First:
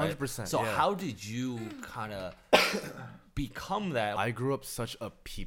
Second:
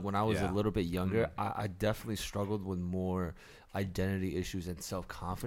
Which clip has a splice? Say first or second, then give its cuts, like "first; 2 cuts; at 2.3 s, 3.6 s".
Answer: first; 1 cut; at 4.1 s